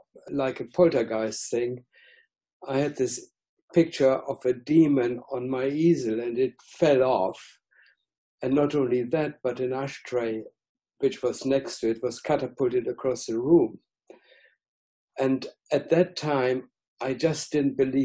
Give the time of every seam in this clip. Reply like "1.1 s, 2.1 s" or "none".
none